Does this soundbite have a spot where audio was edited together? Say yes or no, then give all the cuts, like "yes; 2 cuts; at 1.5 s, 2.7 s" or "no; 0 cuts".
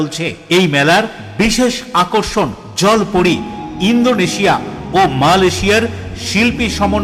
no; 0 cuts